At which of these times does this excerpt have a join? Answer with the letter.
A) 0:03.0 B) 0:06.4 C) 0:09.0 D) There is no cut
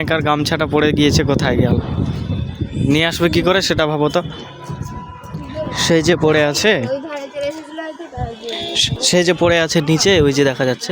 C